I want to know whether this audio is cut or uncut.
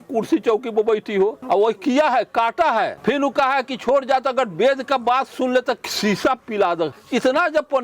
cut